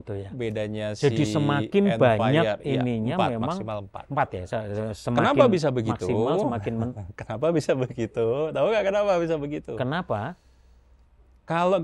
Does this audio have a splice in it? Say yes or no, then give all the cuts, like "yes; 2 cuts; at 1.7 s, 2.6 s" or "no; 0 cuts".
no; 0 cuts